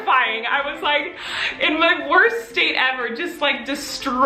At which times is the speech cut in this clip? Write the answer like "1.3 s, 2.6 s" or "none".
none